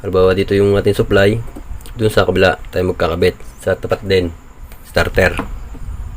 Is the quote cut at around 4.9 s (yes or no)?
yes